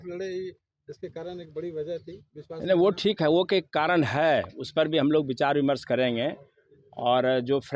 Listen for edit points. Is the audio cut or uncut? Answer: uncut